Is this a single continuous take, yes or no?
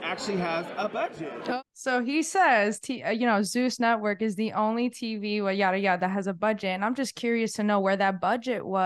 no